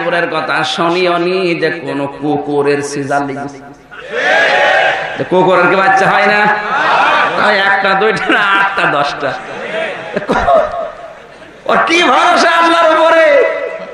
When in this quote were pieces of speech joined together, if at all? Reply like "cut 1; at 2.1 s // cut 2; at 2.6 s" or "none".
none